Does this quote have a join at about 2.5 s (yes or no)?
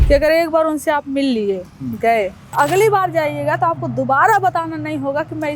yes